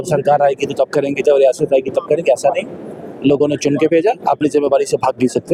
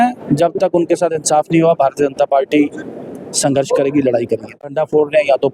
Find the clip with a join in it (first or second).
second